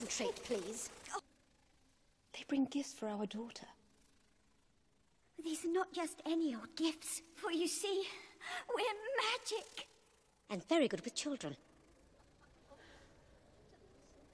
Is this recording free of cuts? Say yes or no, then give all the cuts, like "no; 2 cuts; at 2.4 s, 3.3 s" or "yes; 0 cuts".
yes; 0 cuts